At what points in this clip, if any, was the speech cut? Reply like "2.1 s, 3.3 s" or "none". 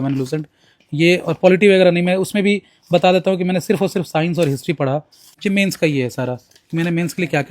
5.3 s